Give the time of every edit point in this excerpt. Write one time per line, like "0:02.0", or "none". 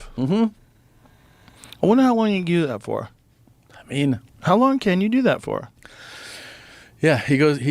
none